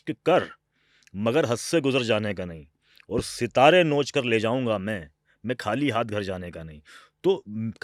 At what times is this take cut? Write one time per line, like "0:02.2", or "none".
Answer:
none